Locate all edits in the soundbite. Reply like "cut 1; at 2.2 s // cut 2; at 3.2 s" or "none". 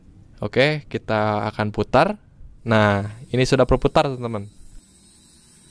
cut 1; at 2.6 s